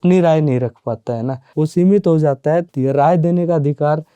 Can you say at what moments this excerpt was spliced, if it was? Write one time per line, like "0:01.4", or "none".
0:01.4
0:02.7